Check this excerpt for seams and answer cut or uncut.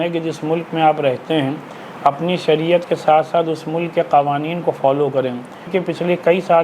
cut